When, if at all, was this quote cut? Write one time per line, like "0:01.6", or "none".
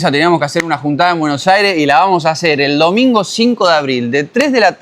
none